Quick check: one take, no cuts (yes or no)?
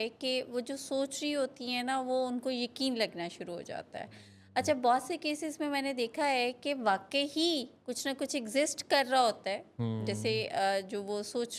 yes